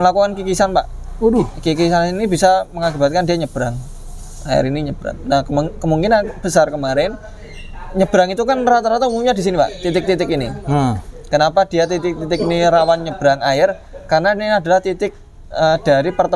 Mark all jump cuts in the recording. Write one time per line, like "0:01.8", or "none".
none